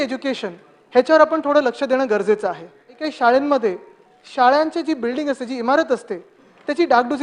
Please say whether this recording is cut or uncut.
cut